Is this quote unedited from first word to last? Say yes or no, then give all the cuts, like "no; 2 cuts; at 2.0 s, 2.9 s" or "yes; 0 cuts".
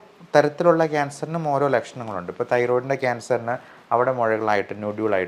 yes; 0 cuts